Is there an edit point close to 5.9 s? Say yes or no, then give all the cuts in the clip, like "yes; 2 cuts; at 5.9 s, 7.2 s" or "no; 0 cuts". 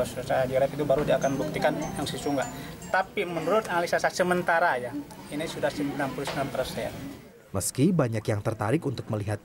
no; 1 cut; at 1.6 s